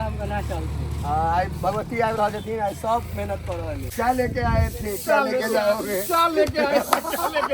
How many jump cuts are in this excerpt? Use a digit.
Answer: 1